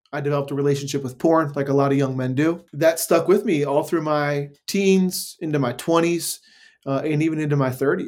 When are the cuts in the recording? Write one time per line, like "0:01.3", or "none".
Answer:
0:02.7